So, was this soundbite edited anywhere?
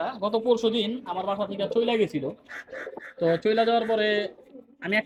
no; 0 cuts

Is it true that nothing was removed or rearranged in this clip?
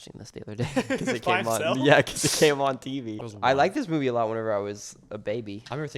no; 1 cut; at 3.1 s

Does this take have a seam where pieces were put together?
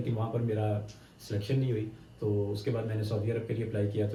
no; 0 cuts

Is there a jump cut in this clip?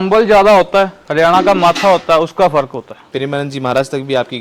yes; 2 cuts; at 1.0 s, 3.0 s

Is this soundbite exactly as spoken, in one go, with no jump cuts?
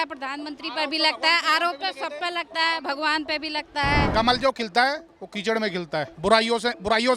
no; 2 cuts; at 4.1 s, 6.1 s

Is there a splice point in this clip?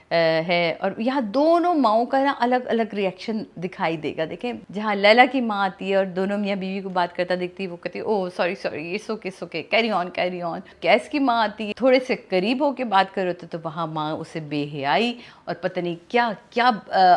yes; 3 cuts; at 4.6 s, 10.7 s, 11.6 s

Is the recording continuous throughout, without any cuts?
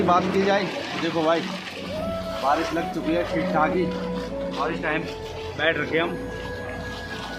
yes; 0 cuts

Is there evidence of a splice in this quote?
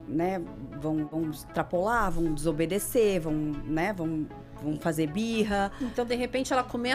yes; 1 cut; at 1.1 s

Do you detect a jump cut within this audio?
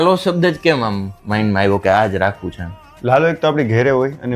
yes; 1 cut; at 1.1 s

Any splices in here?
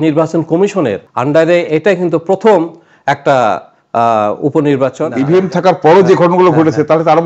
yes; 2 cuts; at 1.1 s, 5.1 s

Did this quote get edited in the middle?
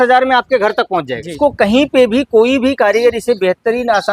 yes; 1 cut; at 1.3 s

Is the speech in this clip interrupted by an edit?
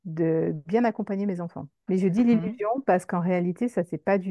no; 0 cuts

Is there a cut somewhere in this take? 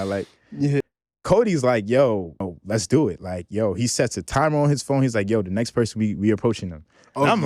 yes; 2 cuts; at 0.8 s, 2.5 s

